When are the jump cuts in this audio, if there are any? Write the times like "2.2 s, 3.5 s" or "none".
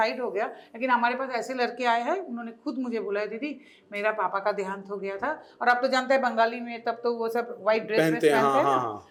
none